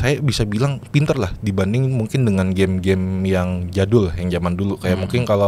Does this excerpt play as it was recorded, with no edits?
yes; 0 cuts

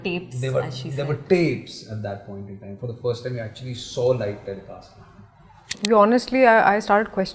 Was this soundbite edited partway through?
yes; 1 cut; at 5.7 s

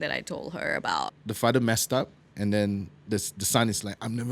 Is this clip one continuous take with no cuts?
no; 1 cut; at 1.2 s

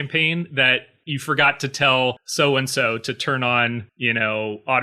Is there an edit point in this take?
yes; 3 cuts; at 0.9 s, 2.2 s, 3.9 s

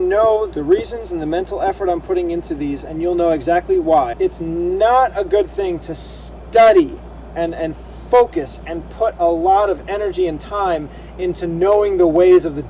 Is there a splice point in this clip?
yes; 2 cuts; at 2.8 s, 4.1 s

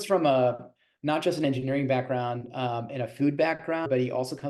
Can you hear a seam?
no; 0 cuts

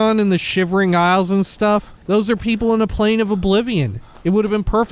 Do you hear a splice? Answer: yes; 1 cut; at 1.9 s

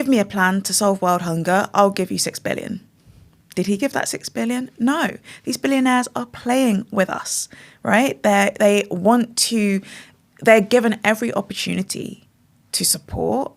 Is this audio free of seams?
yes; 0 cuts

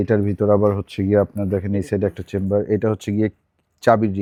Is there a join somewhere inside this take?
no; 0 cuts

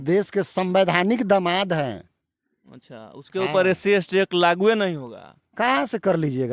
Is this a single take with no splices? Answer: yes; 0 cuts

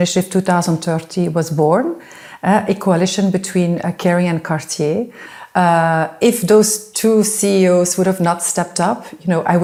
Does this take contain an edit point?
no; 0 cuts

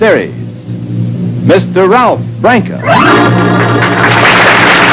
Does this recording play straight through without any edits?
no; 1 cut; at 3.8 s

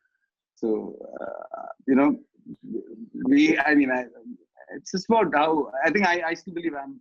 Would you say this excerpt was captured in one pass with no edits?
yes; 0 cuts

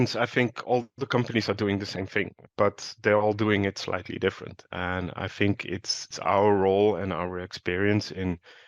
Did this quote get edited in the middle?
yes; 2 cuts; at 2.4 s, 6.1 s

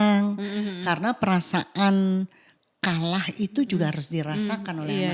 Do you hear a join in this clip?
no; 0 cuts

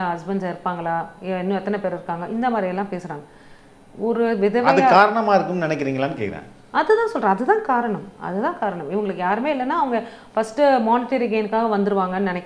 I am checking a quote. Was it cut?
no; 0 cuts

